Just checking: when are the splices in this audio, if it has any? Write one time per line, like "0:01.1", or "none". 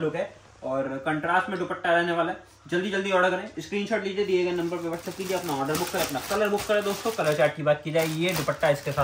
none

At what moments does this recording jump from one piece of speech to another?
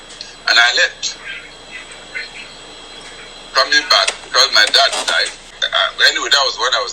0:05.6

